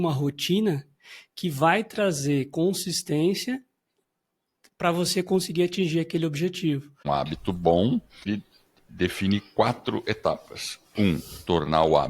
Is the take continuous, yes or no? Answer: no